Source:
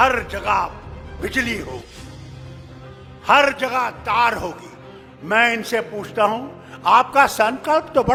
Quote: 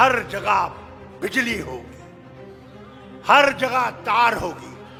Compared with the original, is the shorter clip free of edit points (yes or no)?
yes